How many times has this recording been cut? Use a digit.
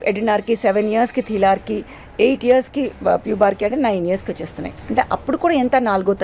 0